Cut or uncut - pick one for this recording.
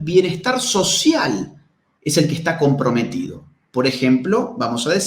uncut